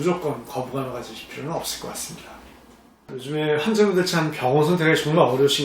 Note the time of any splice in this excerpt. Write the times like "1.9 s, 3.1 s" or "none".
3.2 s